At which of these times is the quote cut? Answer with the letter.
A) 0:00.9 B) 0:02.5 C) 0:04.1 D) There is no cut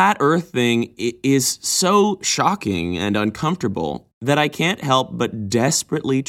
D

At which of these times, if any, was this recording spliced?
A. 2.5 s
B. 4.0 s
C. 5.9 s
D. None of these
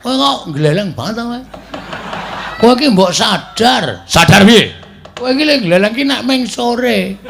A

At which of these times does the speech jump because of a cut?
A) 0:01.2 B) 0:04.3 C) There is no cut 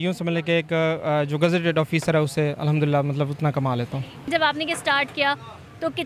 B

